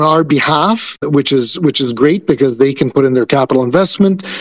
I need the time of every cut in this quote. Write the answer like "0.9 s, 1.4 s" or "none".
1.0 s

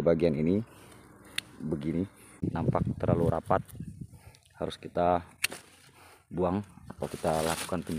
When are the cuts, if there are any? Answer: 2.4 s

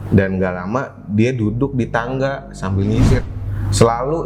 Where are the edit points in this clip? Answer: 3.2 s

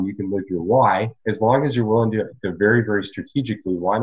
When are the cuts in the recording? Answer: 1.2 s

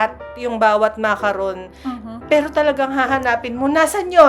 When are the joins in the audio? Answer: none

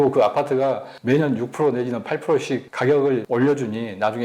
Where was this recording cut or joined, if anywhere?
2.7 s, 3.2 s

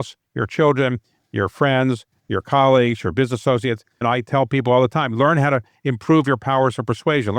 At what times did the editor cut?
4.0 s

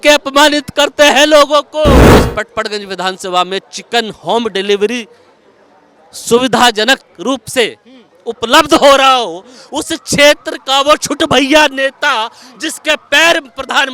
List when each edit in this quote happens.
2.0 s

